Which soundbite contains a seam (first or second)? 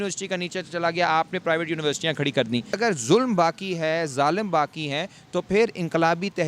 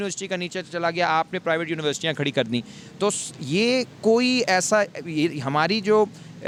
first